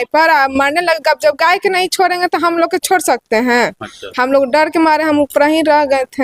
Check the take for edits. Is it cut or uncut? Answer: uncut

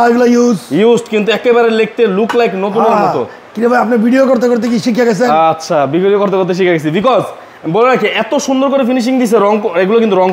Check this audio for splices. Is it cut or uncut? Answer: uncut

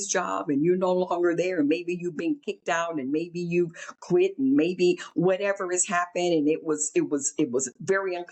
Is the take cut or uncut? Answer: uncut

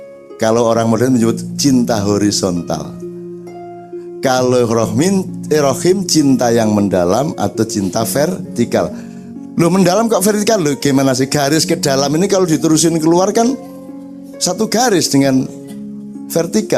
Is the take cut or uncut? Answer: cut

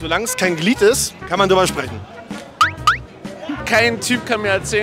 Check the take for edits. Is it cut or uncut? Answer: cut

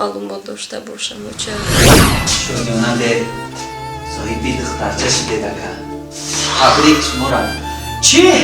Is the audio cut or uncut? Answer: cut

